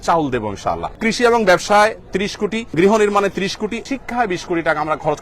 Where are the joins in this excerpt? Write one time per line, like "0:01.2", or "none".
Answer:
0:01.0
0:02.7
0:03.8